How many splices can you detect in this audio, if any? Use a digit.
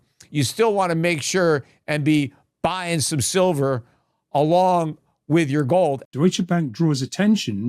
1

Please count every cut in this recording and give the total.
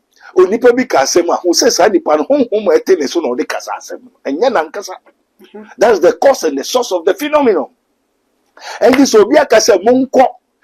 0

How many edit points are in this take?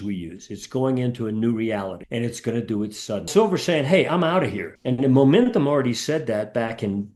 1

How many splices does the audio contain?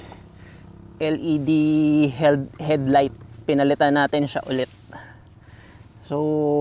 0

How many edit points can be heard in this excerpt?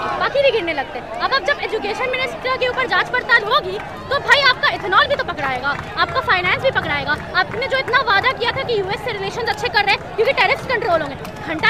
0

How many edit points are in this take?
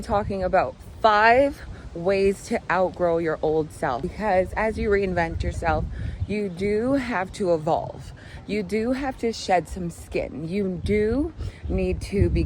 1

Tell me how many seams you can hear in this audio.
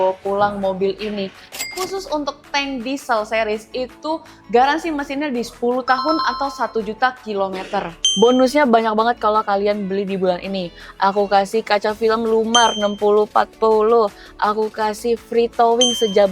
2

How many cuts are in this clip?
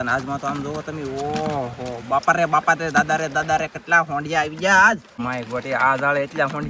1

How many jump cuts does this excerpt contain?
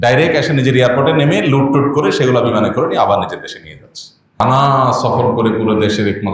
1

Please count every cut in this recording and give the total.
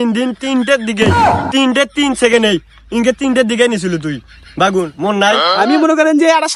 1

